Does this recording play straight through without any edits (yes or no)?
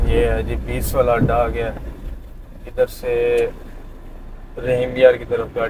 yes